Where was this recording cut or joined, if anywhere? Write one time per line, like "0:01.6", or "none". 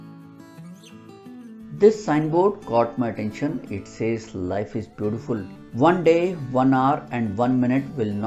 0:01.8